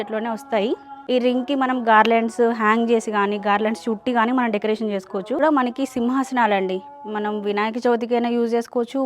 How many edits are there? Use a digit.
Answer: 2